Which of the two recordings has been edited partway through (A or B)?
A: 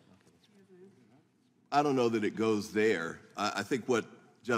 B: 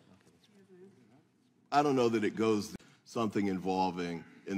A